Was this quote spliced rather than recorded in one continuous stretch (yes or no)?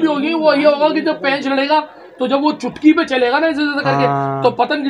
no